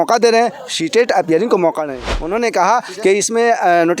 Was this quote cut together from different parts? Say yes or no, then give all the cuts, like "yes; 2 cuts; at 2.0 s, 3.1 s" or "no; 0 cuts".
yes; 1 cut; at 2.1 s